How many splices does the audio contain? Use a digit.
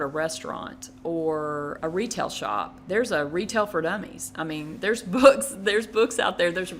2